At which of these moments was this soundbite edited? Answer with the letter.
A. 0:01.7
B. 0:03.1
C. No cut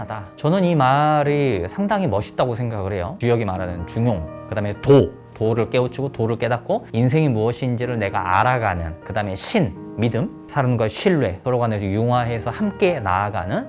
B